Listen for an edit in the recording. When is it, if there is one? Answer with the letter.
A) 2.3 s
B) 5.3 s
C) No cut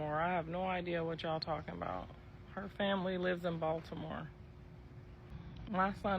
B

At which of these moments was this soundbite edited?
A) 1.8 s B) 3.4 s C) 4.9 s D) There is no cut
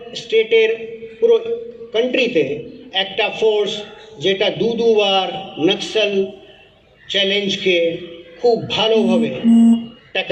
D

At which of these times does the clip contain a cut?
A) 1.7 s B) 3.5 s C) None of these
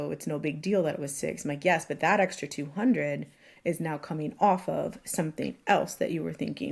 C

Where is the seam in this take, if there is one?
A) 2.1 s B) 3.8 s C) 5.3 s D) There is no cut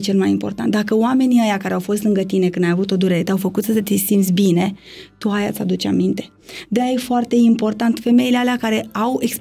D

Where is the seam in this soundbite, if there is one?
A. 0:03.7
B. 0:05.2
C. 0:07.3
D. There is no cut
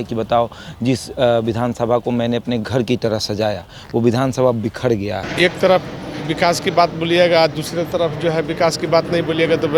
B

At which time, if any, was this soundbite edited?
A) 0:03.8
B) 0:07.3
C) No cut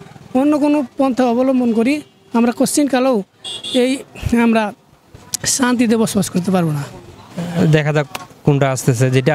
B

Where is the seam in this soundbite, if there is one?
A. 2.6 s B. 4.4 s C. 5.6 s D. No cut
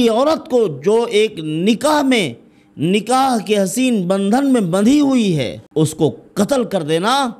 C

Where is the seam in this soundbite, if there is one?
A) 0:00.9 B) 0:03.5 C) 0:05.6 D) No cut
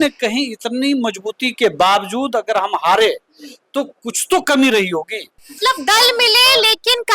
C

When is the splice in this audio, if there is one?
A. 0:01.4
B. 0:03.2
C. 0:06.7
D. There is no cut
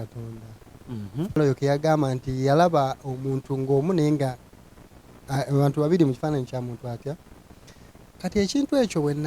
A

